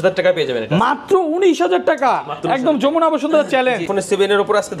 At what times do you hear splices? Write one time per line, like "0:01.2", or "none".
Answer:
0:03.9

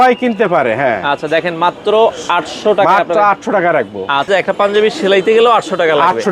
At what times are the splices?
0:04.3

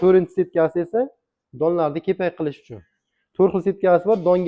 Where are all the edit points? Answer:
none

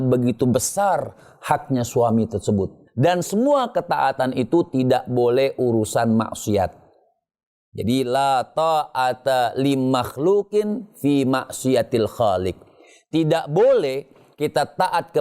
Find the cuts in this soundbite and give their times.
0:02.8

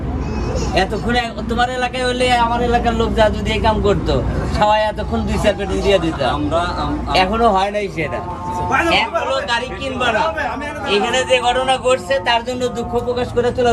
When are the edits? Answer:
none

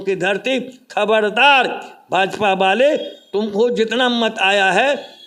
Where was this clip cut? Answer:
none

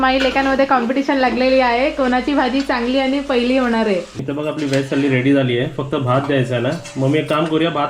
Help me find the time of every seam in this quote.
0:04.1

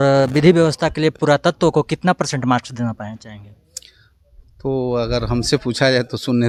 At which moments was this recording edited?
none

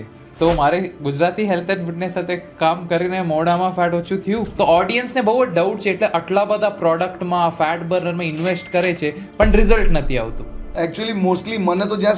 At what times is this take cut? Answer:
0:04.5

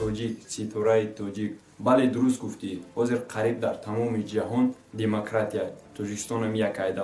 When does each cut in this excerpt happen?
none

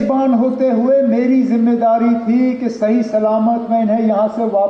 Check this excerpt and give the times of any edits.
none

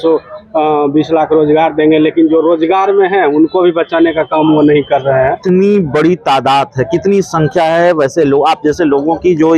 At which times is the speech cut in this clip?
0:05.4

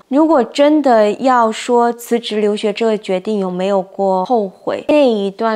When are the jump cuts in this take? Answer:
0:01.2
0:04.3

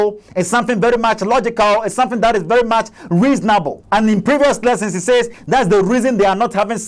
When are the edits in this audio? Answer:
0:03.8

